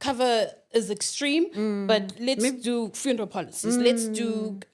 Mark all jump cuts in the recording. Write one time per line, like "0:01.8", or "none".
none

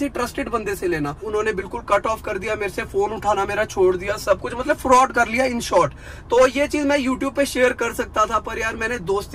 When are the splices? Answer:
0:01.2

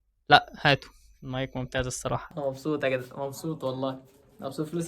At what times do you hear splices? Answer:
0:02.3

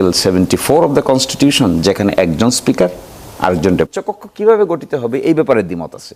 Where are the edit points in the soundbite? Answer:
0:03.9

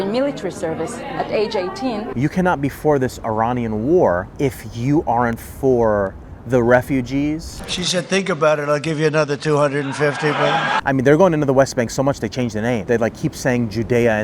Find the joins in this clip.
0:02.1
0:07.6
0:10.8

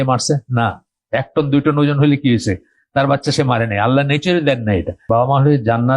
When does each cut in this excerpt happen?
0:05.0

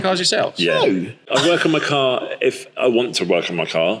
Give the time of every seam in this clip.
0:01.3

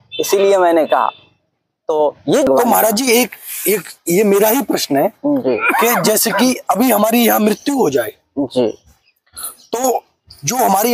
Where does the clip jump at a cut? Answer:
0:02.5

